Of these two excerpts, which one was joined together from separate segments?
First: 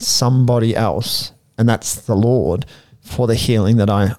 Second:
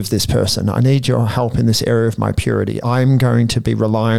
second; 1 cut; at 2.8 s

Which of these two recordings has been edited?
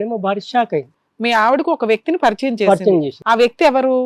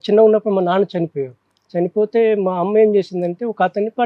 first; 1 cut; at 0.9 s

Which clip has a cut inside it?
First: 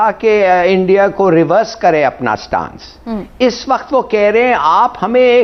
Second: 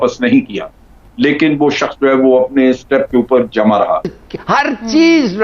second; 2 cuts; at 1.0 s, 4.1 s

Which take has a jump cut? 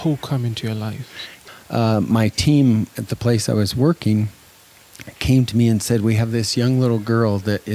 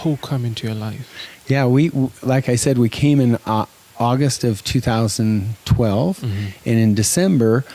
first; 1 cut; at 1.4 s

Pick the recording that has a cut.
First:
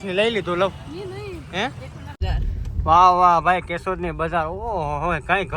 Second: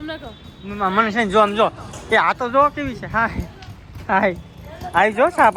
first; 1 cut; at 2.2 s

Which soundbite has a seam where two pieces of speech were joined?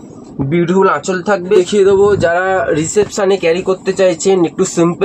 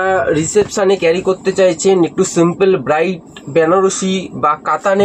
first; 1 cut; at 1.5 s

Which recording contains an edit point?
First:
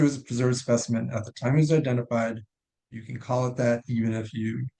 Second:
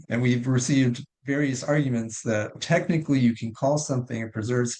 second; 1 cut; at 2.5 s

